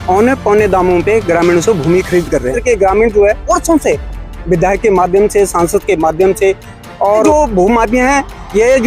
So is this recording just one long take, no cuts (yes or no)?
no